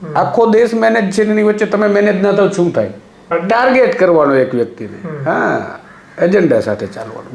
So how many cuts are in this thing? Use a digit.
1